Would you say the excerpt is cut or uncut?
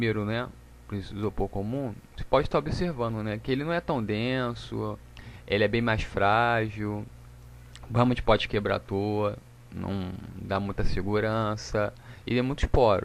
uncut